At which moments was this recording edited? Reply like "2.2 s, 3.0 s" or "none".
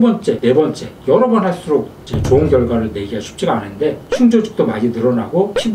4.0 s